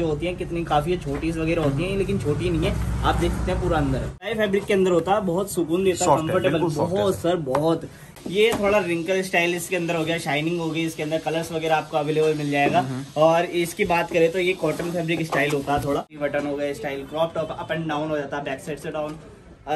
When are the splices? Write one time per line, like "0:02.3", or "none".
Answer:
0:04.3
0:08.0
0:16.1